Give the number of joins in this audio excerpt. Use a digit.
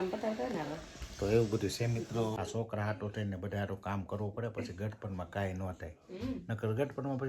1